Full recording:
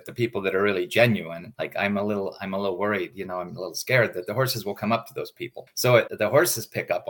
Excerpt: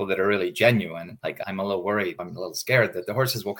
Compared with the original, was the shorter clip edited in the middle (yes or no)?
yes